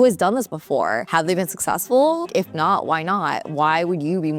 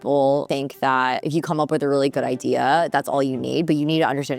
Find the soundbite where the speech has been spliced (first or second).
second